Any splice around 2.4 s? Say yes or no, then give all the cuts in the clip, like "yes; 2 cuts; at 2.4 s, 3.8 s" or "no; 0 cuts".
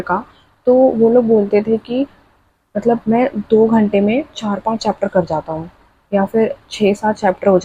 no; 0 cuts